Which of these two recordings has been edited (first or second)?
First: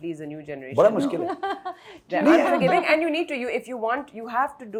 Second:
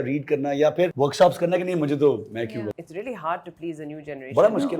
second